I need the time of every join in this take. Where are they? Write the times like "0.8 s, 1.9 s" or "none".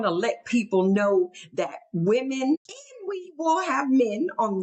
2.6 s